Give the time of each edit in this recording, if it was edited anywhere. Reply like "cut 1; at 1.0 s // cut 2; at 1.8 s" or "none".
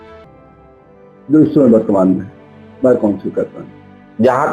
cut 1; at 1.3 s